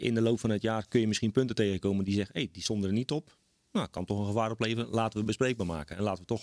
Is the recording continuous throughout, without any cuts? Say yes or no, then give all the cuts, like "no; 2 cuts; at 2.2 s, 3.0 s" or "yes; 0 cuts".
yes; 0 cuts